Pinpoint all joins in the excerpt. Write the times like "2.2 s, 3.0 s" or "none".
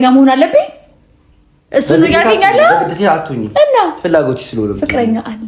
none